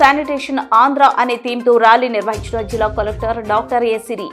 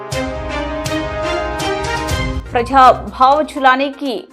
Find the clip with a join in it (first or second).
second